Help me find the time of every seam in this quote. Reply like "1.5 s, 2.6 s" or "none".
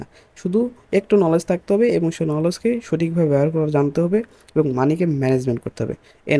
none

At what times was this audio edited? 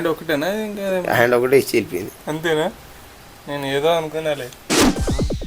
none

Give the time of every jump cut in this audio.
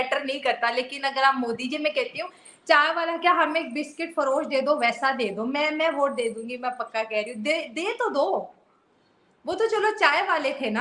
none

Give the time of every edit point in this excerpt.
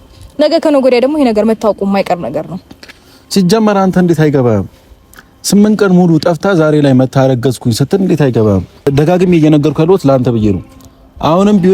8.9 s

